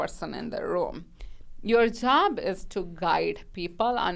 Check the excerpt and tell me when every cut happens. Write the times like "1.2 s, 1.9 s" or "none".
none